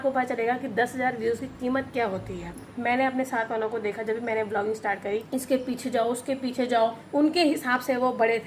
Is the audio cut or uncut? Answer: cut